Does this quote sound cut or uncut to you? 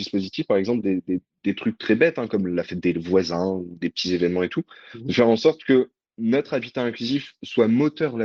uncut